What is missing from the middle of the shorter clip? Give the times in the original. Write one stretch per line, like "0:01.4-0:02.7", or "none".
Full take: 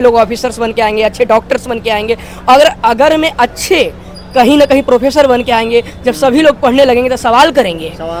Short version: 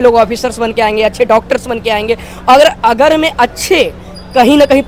none